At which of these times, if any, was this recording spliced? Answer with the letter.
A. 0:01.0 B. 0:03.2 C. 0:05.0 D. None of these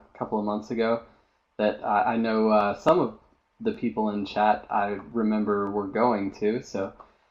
C